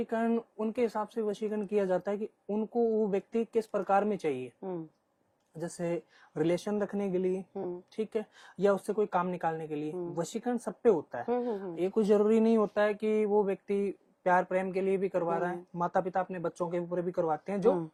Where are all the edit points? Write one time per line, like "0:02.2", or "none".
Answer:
none